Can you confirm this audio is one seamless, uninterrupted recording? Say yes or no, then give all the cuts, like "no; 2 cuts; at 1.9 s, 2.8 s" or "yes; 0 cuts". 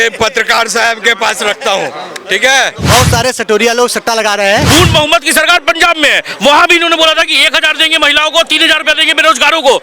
no; 2 cuts; at 2.8 s, 4.6 s